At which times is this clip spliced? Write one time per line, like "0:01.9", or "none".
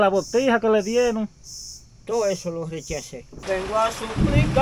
0:03.3